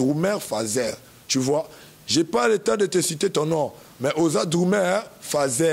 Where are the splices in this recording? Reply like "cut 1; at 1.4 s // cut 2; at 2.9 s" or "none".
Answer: none

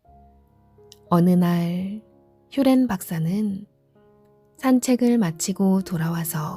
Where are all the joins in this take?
cut 1; at 1.1 s

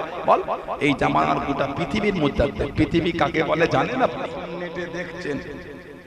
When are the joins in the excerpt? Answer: cut 1; at 4.4 s

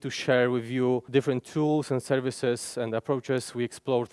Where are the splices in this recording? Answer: cut 1; at 1.0 s

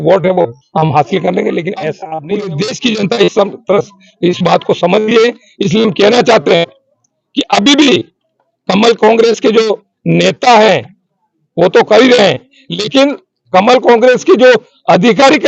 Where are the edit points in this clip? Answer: cut 1; at 2.1 s

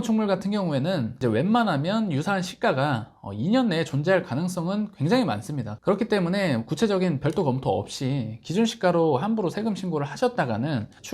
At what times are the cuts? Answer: cut 1; at 1.2 s

